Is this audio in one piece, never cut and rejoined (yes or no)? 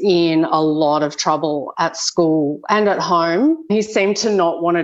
no